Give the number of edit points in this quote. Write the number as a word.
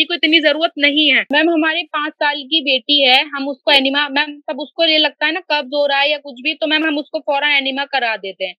one